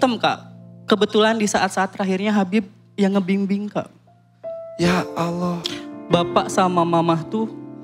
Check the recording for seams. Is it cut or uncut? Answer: cut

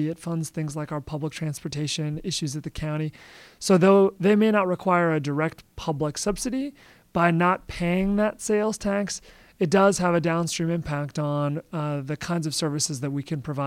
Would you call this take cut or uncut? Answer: uncut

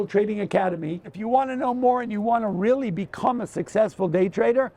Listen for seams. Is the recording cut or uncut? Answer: cut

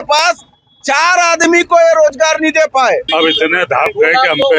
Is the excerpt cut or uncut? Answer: cut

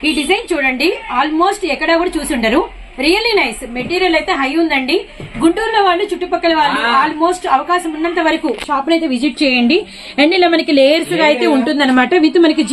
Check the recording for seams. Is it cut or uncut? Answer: uncut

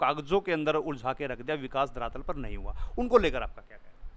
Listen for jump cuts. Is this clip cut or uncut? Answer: uncut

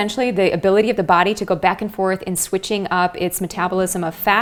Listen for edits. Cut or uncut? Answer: uncut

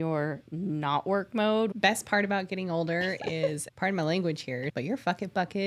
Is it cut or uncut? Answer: cut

